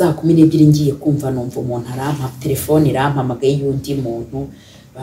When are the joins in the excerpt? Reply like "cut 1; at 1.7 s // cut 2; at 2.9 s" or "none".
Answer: none

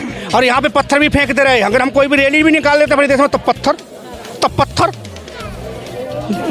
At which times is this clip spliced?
none

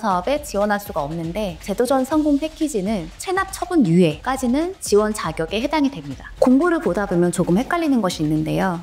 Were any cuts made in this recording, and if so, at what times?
cut 1; at 6.2 s

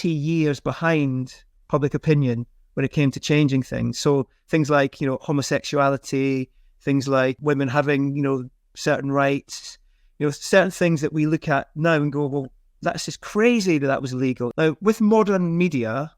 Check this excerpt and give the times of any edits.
cut 1; at 7.4 s // cut 2; at 14.5 s

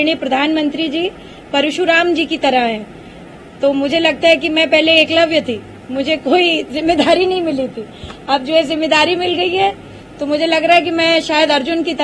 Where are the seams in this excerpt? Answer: none

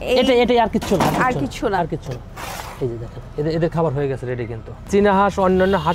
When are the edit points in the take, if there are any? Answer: cut 1; at 4.9 s

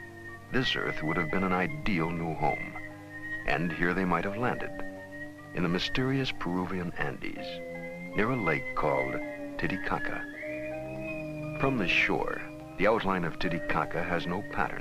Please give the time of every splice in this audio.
cut 1; at 4.8 s

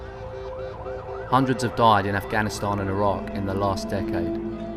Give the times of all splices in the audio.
cut 1; at 1.2 s

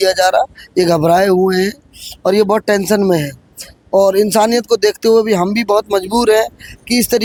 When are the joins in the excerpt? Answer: none

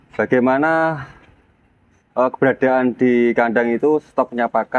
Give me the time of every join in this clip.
none

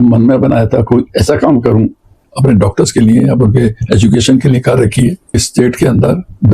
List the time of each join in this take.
cut 1; at 2.2 s // cut 2; at 5.5 s

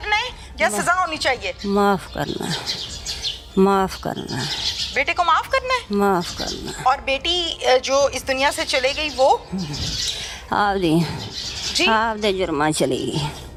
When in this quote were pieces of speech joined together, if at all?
none

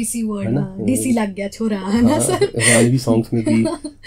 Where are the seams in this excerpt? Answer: none

